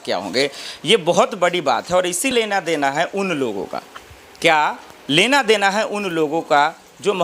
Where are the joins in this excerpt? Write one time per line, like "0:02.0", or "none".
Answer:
0:02.3